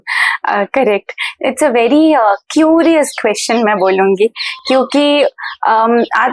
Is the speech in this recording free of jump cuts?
yes; 0 cuts

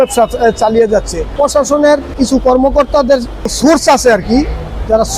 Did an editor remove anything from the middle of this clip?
yes; 3 cuts; at 1.3 s, 2.1 s, 3.5 s

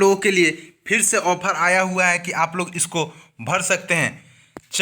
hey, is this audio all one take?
no; 1 cut; at 2.5 s

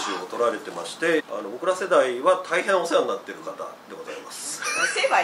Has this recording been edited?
yes; 1 cut; at 1.2 s

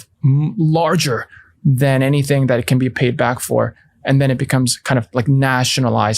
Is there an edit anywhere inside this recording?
no; 0 cuts

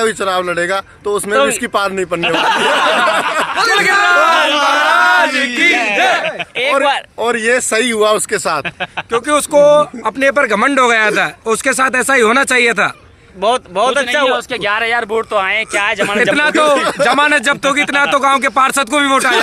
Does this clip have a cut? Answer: no; 0 cuts

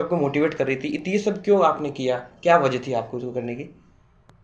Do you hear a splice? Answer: no; 0 cuts

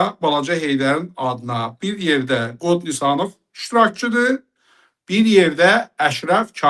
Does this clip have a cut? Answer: no; 0 cuts

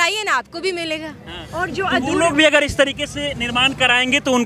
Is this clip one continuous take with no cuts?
yes; 0 cuts

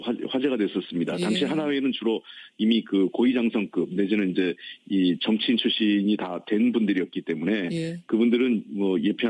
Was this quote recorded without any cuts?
yes; 0 cuts

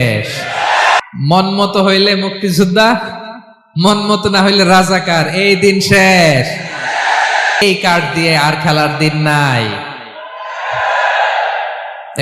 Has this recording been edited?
yes; 2 cuts; at 1.0 s, 7.6 s

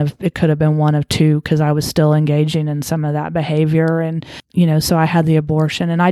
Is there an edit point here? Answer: yes; 1 cut; at 4.4 s

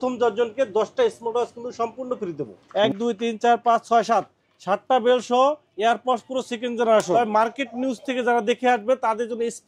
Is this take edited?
yes; 2 cuts; at 2.6 s, 7.1 s

